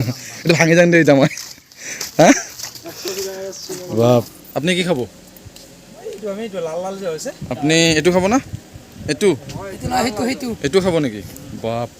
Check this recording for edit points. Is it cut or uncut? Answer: cut